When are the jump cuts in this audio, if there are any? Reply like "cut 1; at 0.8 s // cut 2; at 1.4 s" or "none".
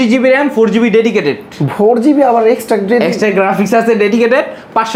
none